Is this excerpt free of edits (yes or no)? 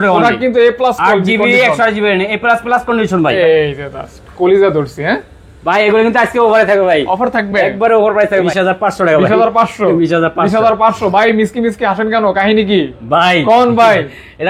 no